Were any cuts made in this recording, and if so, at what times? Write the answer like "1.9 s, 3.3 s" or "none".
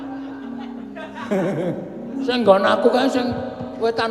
1.8 s